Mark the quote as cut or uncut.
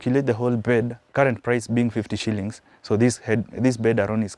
cut